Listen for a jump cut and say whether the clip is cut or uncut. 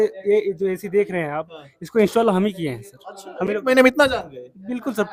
uncut